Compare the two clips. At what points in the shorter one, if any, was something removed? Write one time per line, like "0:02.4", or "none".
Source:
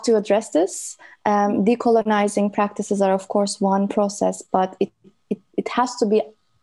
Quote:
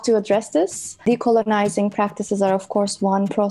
0:01.0